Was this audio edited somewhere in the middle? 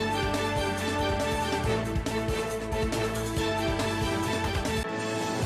yes; 1 cut; at 3.8 s

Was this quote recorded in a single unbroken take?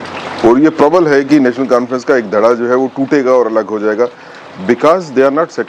yes; 0 cuts

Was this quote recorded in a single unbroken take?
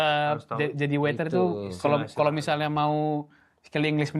yes; 0 cuts

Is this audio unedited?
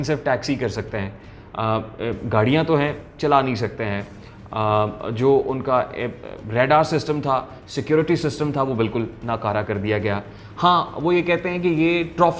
yes; 0 cuts

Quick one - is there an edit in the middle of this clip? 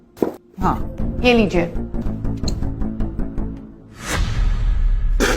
yes; 2 cuts; at 0.9 s, 2.0 s

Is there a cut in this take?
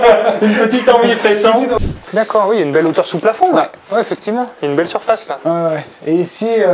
yes; 1 cut; at 1.7 s

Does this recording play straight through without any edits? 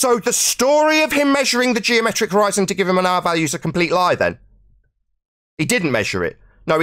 yes; 0 cuts

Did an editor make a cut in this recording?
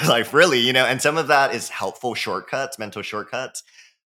no; 0 cuts

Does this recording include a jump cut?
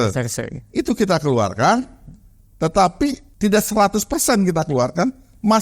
yes; 1 cut; at 3.3 s

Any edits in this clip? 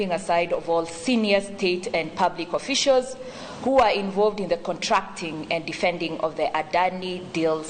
no; 0 cuts

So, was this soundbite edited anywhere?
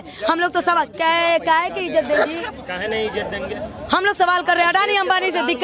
no; 0 cuts

